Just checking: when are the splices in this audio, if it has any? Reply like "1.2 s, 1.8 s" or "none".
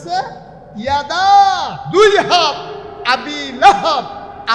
1.7 s